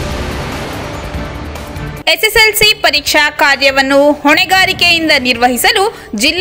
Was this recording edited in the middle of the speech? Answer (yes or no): yes